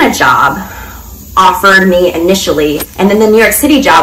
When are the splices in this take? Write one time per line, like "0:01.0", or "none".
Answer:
0:02.9